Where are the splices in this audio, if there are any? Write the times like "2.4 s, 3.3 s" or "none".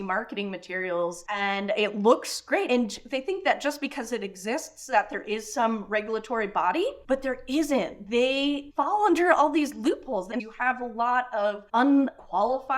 1.2 s, 2.7 s, 10.3 s, 11.6 s